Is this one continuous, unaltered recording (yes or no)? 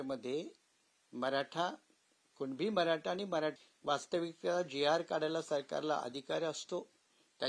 no